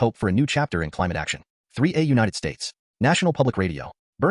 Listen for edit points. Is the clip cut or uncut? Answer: cut